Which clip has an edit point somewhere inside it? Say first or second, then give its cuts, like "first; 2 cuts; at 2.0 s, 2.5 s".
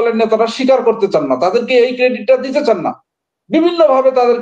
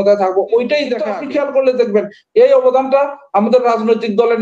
second; 1 cut; at 1.1 s